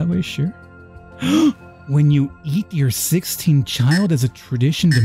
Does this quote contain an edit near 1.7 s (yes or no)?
yes